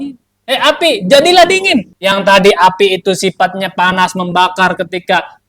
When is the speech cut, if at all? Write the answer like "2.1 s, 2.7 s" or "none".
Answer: 1.9 s